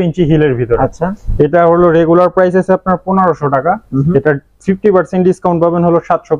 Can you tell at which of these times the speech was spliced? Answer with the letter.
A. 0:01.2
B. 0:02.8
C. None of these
C